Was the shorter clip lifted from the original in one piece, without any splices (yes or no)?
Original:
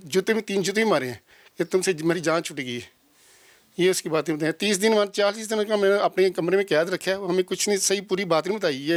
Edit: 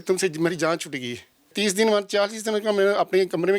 no